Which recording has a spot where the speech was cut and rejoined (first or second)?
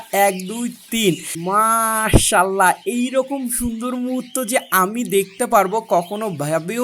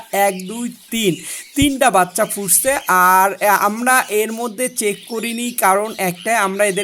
first